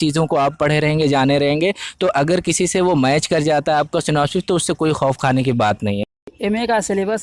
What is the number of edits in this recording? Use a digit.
1